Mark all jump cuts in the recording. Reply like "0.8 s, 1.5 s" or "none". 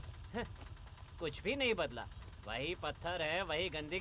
none